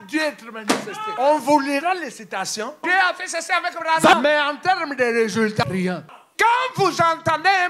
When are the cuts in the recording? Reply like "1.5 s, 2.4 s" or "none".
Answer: 1.0 s, 2.9 s, 4.1 s, 5.6 s